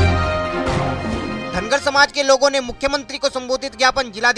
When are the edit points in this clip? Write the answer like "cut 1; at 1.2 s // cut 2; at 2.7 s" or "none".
cut 1; at 1.4 s